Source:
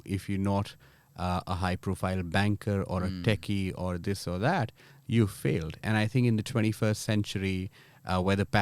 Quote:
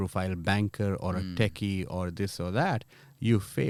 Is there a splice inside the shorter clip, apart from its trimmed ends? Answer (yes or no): no